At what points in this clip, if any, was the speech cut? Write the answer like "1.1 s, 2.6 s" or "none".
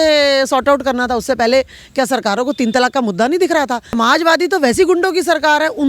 4.0 s